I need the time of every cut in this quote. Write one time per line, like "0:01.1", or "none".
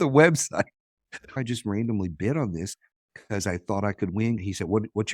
0:01.3
0:04.4